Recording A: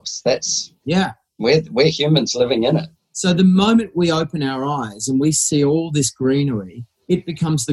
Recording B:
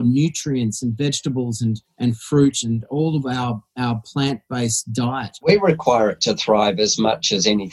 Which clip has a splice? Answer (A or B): B